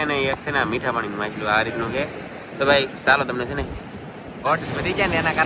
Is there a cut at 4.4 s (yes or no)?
yes